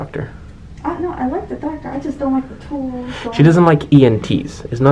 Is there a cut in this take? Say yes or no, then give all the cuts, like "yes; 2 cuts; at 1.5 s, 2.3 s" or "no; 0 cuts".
no; 0 cuts